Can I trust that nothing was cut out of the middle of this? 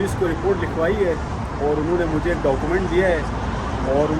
yes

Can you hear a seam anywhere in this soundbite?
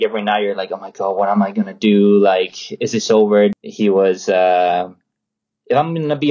yes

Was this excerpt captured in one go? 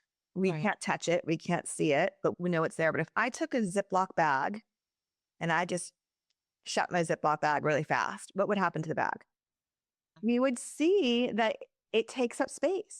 no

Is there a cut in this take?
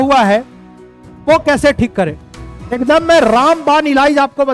no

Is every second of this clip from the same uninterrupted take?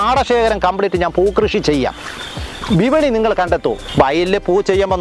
no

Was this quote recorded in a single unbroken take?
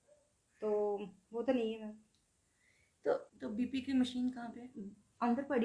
no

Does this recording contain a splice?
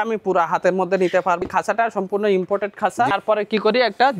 yes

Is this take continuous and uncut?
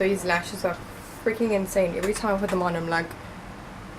yes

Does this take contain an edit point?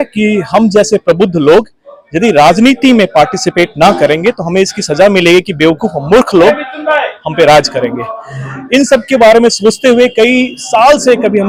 no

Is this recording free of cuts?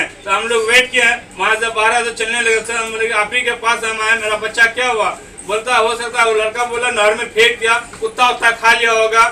yes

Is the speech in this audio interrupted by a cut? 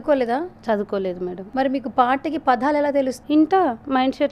yes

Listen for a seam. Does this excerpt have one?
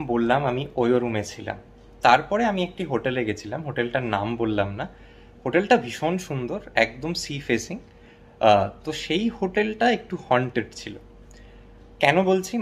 no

